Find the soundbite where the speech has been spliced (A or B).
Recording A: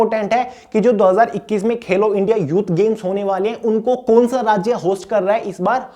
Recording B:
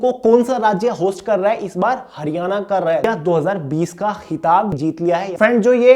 B